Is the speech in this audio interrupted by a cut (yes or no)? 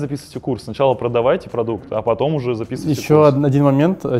no